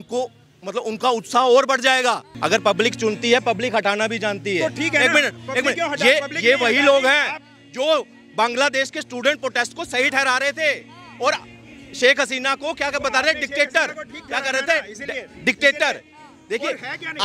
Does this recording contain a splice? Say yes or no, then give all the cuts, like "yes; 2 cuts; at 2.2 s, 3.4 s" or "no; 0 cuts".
yes; 1 cut; at 2.3 s